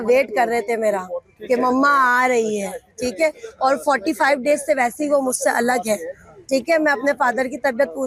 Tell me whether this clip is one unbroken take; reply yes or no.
yes